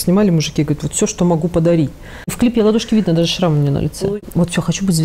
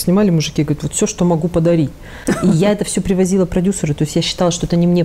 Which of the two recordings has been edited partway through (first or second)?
first